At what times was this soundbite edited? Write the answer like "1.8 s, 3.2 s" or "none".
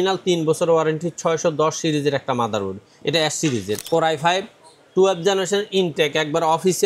3.8 s